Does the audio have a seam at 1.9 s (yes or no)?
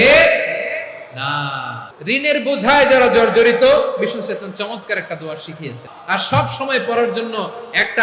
yes